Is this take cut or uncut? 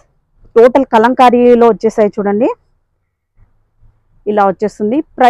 uncut